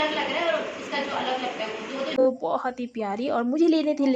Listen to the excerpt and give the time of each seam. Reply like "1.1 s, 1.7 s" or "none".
2.2 s